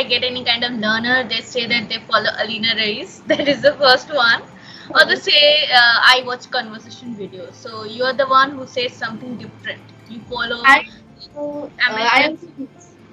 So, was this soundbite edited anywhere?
no; 0 cuts

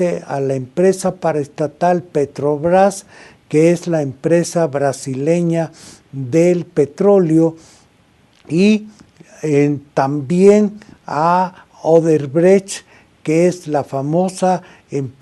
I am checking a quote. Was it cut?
yes; 1 cut; at 12.6 s

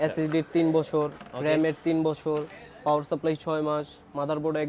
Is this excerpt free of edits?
yes; 0 cuts

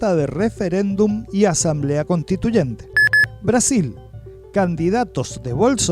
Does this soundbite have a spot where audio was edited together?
yes; 1 cut; at 2.8 s

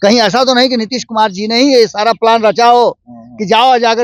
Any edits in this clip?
no; 0 cuts

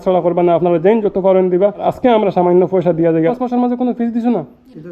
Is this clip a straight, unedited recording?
no; 1 cut; at 3.1 s

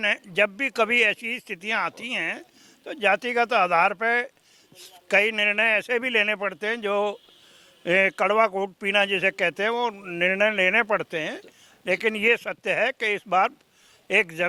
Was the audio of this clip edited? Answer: no; 0 cuts

